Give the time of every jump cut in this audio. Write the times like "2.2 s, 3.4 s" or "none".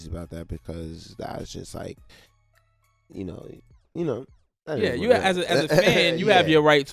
5.7 s